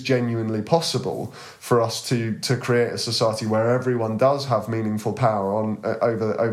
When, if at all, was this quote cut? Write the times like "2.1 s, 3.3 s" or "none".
none